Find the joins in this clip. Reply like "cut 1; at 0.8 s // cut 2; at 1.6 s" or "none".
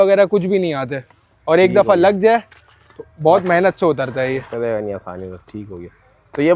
none